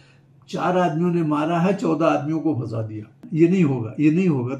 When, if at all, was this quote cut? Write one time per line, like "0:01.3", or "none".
0:03.2

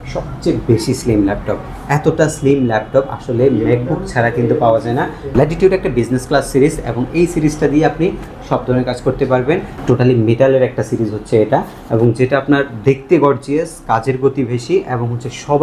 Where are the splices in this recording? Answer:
0:05.3
0:09.7

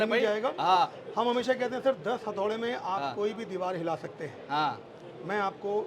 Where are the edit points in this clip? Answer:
none

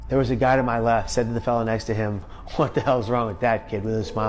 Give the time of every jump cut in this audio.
0:01.1
0:02.3

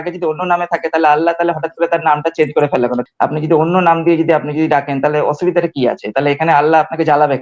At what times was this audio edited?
0:03.0

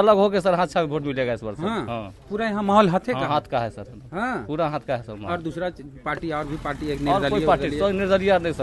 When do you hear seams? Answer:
none

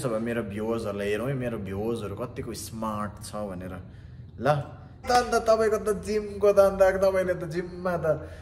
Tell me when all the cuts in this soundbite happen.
0:05.0

